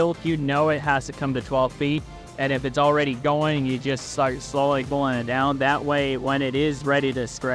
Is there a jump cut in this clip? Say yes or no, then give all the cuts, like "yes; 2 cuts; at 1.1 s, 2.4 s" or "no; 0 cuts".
no; 0 cuts